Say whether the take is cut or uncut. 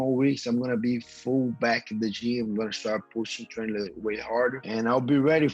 cut